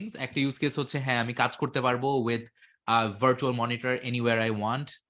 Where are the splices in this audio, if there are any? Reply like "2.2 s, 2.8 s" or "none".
none